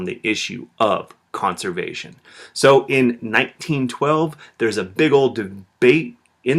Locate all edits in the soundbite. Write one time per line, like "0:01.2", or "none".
0:01.6